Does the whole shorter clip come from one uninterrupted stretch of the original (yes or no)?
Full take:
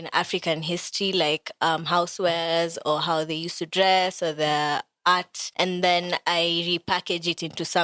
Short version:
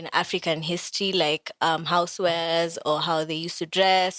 yes